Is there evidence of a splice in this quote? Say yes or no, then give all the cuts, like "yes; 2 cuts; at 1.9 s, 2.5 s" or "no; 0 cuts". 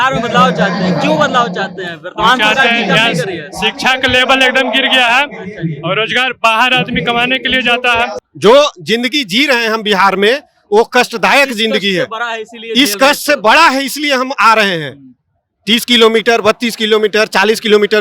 yes; 1 cut; at 8.2 s